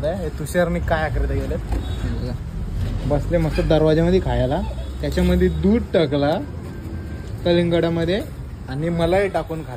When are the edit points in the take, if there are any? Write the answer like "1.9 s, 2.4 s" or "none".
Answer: none